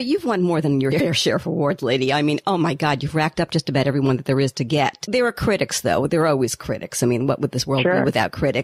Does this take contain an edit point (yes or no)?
yes